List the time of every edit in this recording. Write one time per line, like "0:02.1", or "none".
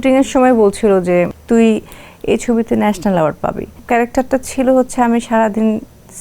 0:01.4
0:03.7